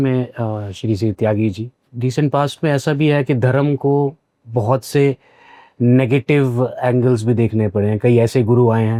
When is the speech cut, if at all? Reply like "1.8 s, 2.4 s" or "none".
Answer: none